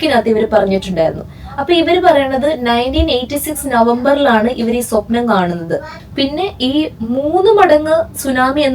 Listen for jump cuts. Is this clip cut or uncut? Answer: cut